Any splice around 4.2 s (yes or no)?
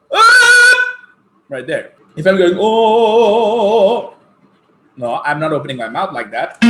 no